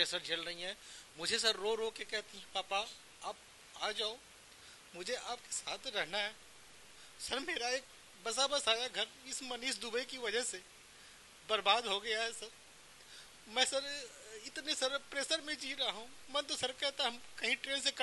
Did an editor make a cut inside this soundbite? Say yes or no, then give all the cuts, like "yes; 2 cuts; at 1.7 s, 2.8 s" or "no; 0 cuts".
no; 0 cuts